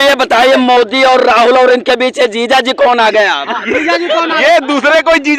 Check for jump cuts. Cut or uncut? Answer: uncut